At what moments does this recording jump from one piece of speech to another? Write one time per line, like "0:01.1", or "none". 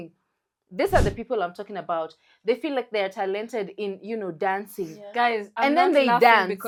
none